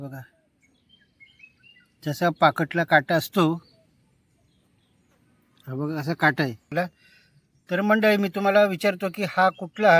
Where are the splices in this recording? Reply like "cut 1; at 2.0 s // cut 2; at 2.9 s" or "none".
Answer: cut 1; at 6.7 s